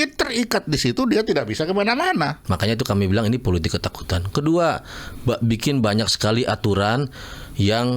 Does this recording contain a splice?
yes; 1 cut; at 2.4 s

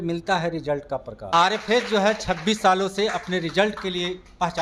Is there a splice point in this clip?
yes; 1 cut; at 1.3 s

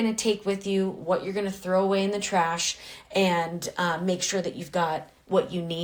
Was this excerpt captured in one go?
yes; 0 cuts

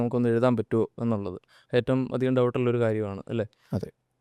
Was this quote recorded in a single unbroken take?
yes; 0 cuts

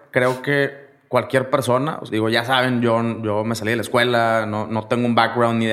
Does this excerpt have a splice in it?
yes; 1 cut; at 2.0 s

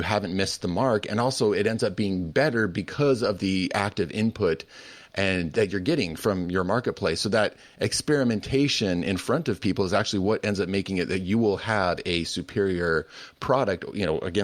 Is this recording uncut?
yes; 0 cuts

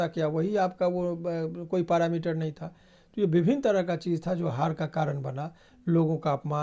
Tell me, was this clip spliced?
no; 0 cuts

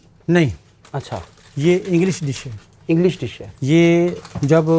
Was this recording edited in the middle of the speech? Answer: no; 0 cuts

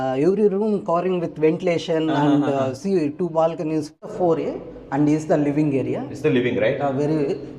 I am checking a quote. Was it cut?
yes; 1 cut; at 4.1 s

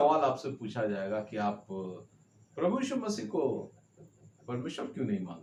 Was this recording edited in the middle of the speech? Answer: no; 0 cuts

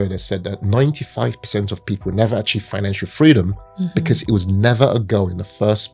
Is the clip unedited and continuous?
yes; 0 cuts

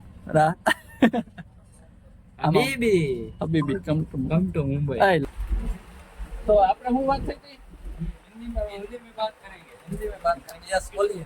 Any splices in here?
yes; 1 cut; at 5.2 s

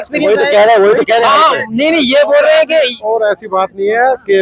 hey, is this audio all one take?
yes; 0 cuts

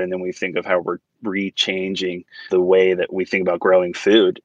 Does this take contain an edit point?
yes; 1 cut; at 2.3 s

